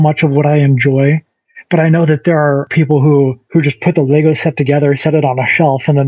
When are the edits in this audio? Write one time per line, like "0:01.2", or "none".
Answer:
0:02.7
0:03.4